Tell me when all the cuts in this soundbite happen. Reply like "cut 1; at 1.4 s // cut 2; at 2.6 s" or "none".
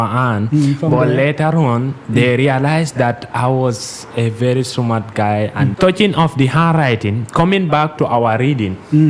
cut 1; at 5.7 s

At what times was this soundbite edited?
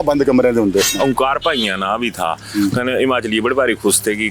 cut 1; at 0.9 s

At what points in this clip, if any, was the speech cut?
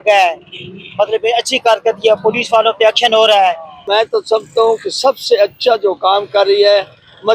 cut 1; at 3.8 s

